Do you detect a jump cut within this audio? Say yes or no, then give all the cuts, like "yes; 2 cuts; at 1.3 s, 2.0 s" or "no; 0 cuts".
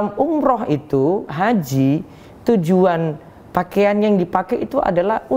no; 0 cuts